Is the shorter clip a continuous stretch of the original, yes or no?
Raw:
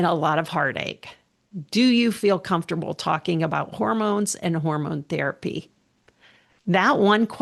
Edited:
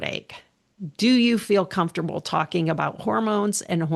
yes